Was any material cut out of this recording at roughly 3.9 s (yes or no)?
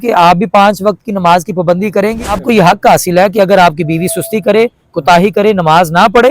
no